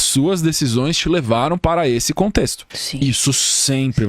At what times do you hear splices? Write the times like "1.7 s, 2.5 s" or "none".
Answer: 2.6 s

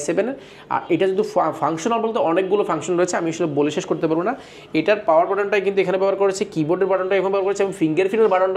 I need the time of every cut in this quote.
none

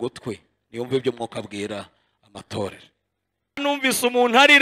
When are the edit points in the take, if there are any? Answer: 3.6 s

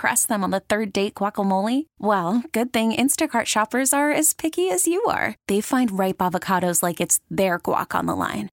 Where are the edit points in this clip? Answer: none

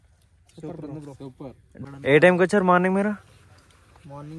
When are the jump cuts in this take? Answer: 1.8 s

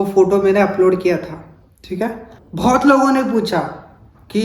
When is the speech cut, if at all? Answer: 2.3 s

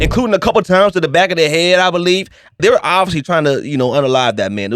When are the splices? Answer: 2.6 s

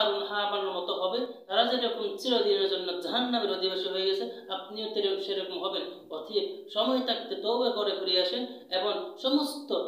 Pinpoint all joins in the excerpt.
1.4 s

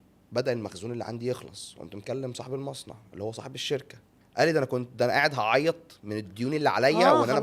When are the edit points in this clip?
4.1 s

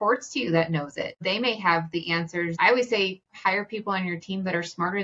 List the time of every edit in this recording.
1.2 s, 2.5 s

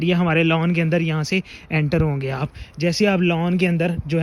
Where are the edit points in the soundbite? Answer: none

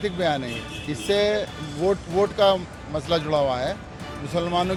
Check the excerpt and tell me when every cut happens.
none

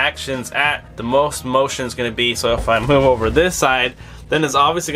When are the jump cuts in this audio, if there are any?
none

